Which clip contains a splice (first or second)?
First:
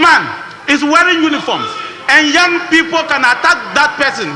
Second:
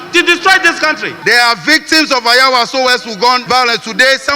second